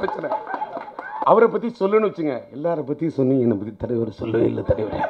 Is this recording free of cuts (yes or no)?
no